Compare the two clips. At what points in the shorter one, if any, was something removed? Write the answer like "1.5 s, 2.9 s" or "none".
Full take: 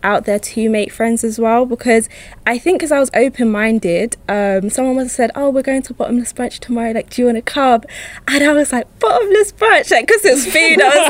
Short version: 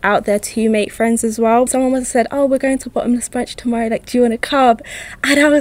1.7 s